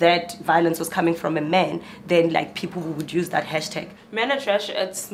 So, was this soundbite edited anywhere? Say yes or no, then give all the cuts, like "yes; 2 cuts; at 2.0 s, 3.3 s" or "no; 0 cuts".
no; 0 cuts